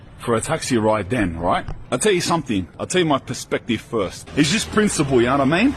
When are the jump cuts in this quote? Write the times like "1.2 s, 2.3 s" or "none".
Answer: 4.3 s